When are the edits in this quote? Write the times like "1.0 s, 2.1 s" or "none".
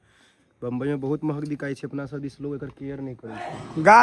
none